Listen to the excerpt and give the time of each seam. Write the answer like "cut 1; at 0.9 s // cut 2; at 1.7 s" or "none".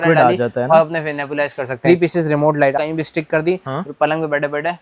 cut 1; at 1.7 s // cut 2; at 2.8 s